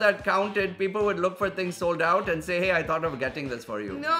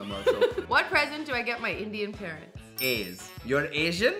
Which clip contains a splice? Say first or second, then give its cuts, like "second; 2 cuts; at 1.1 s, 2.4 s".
second; 2 cuts; at 0.7 s, 3.3 s